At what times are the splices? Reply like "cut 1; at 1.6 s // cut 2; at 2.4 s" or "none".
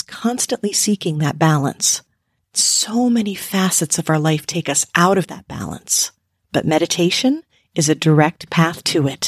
none